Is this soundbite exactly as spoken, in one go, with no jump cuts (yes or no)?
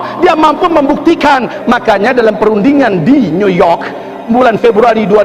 no